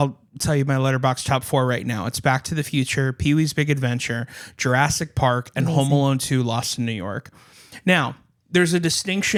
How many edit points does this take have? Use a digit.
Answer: 0